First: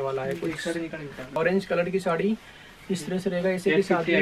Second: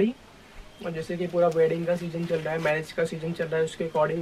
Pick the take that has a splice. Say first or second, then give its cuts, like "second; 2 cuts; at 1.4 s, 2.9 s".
first; 1 cut; at 1.3 s